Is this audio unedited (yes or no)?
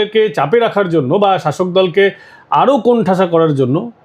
yes